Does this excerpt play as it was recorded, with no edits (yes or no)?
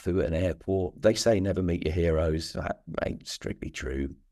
no